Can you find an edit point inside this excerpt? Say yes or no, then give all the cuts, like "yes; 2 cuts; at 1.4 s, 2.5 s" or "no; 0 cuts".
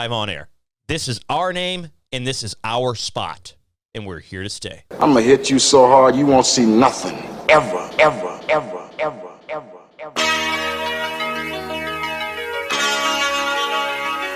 yes; 1 cut; at 4.9 s